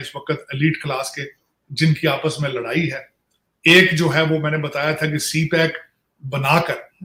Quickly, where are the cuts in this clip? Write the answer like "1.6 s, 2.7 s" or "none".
none